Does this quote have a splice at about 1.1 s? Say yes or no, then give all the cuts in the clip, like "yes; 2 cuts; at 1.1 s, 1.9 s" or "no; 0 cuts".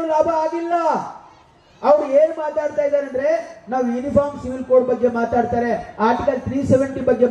no; 0 cuts